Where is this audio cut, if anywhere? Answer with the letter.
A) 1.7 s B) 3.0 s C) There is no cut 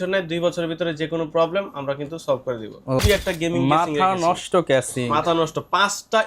B